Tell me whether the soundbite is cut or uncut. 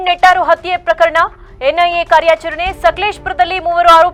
uncut